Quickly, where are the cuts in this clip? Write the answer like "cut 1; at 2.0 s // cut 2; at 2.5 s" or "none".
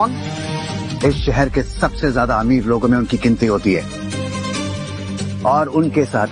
none